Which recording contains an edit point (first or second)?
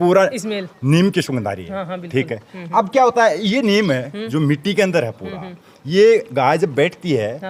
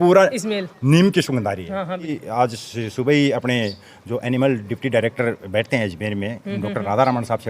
second